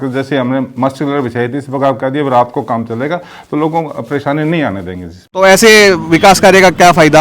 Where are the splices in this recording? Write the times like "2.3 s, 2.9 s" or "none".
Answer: 5.3 s